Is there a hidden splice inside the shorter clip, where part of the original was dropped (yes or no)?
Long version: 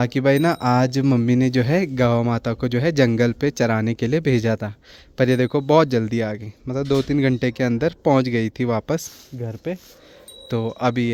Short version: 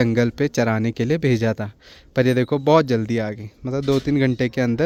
no